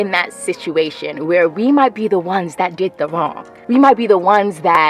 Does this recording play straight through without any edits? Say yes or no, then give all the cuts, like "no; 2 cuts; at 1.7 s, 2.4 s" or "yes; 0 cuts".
no; 1 cut; at 3.5 s